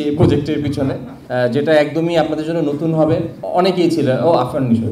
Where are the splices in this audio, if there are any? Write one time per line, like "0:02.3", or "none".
0:01.1
0:03.4